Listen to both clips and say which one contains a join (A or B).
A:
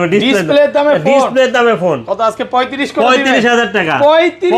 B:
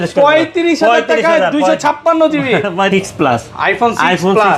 B